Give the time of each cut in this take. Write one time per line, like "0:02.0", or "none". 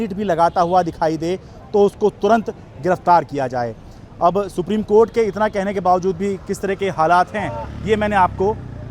none